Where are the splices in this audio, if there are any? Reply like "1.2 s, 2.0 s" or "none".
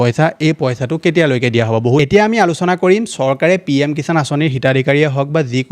2.0 s